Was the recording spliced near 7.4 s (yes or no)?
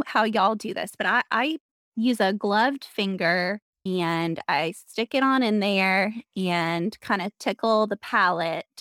no